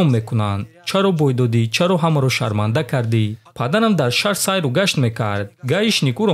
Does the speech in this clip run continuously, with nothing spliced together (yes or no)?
no